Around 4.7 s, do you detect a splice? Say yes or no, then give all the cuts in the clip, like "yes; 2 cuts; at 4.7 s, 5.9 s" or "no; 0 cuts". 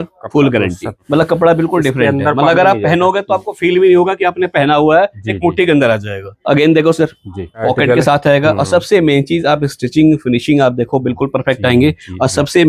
no; 3 cuts; at 1.0 s, 6.3 s, 7.6 s